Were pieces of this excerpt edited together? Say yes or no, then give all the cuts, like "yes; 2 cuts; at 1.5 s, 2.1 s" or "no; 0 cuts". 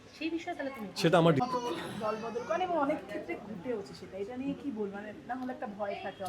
yes; 1 cut; at 1.4 s